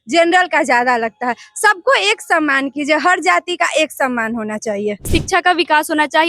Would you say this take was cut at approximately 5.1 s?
yes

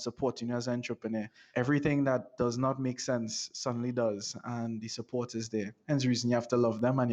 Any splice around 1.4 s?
yes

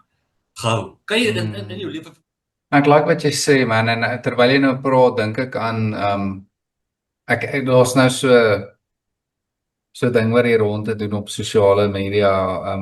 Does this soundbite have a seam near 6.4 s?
no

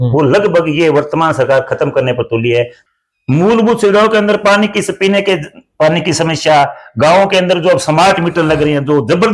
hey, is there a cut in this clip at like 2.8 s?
yes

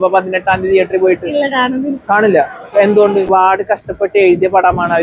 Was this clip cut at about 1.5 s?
no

